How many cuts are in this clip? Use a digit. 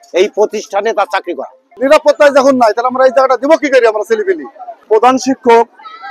2